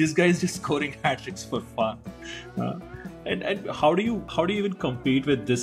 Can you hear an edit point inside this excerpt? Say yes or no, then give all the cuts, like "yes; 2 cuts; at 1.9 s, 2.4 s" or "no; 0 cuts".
no; 0 cuts